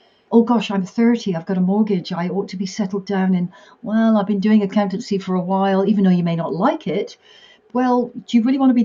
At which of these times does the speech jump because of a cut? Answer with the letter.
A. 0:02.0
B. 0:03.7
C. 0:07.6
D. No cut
C